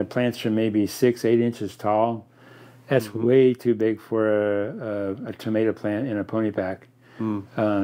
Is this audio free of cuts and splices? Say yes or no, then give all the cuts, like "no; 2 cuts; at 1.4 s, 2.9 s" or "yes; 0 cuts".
yes; 0 cuts